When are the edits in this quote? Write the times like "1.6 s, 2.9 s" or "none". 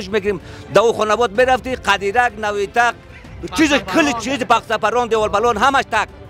none